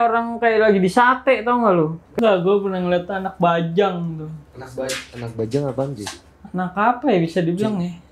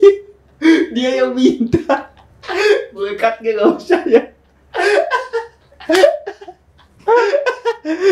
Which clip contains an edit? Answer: first; 1 cut; at 2.2 s

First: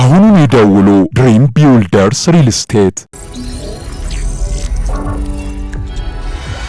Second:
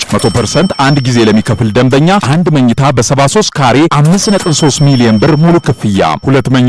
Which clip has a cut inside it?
first; 1 cut; at 3.1 s

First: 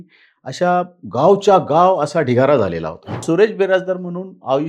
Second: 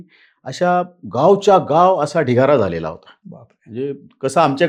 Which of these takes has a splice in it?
first; 1 cut; at 3.1 s

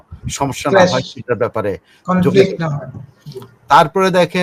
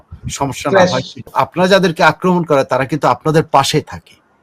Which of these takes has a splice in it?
second; 1 cut; at 1.4 s

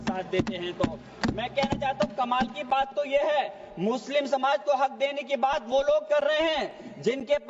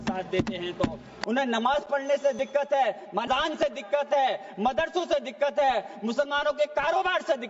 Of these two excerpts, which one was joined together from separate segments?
second; 2 cuts; at 1.1 s, 3.2 s

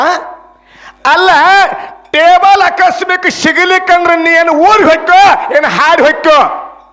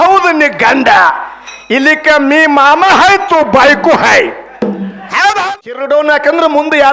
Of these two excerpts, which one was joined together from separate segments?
second; 1 cut; at 5.4 s

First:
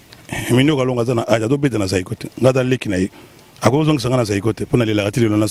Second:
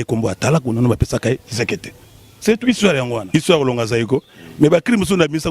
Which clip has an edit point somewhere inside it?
second; 1 cut; at 3.2 s

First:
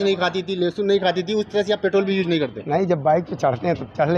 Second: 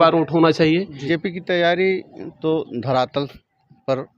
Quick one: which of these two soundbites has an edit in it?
second; 1 cut; at 1.0 s

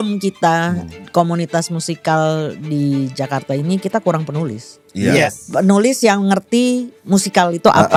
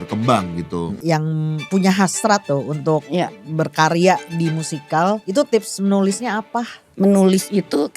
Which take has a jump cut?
second; 4 cuts; at 1.1 s, 2.4 s, 5.2 s, 6.8 s

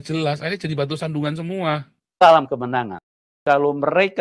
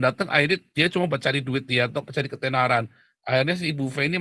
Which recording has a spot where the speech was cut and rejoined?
first; 1 cut; at 2.1 s

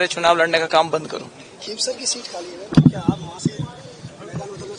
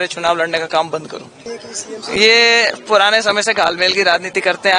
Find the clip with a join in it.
second; 1 cut; at 1.5 s

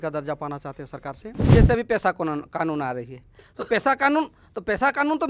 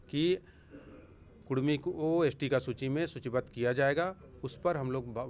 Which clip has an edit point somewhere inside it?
first; 1 cut; at 1.5 s

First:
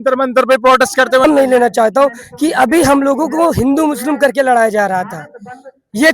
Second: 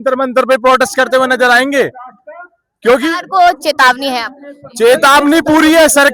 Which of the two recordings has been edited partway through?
first; 1 cut; at 1.2 s

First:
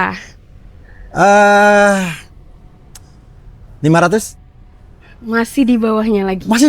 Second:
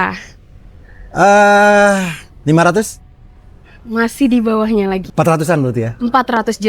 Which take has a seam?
second; 2 cuts; at 2.2 s, 5.0 s

